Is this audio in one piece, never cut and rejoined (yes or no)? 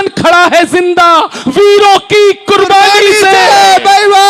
yes